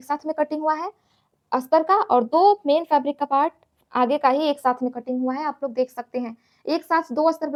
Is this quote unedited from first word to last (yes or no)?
yes